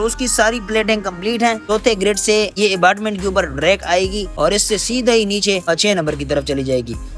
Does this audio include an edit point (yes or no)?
yes